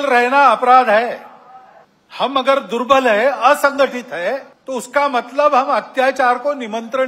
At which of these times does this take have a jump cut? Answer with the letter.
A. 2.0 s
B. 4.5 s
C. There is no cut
B